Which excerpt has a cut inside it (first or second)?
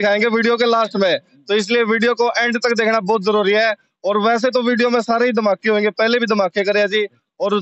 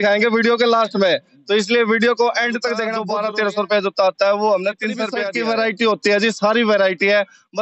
second